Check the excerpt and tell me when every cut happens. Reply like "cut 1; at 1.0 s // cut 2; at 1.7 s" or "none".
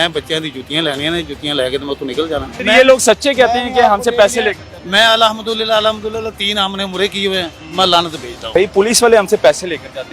cut 1; at 2.5 s // cut 2; at 8.5 s